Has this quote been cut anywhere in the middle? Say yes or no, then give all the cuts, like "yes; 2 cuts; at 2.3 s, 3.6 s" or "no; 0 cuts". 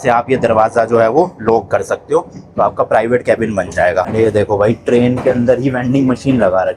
yes; 1 cut; at 4.1 s